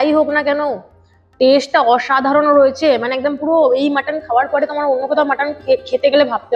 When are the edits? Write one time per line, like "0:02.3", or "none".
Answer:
none